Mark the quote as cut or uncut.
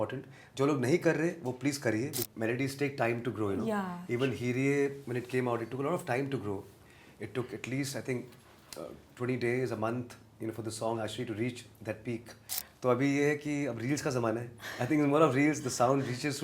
cut